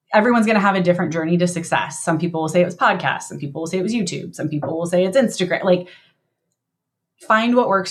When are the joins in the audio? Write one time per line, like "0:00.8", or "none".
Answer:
none